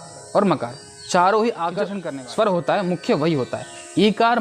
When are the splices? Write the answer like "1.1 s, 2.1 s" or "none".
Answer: 2.0 s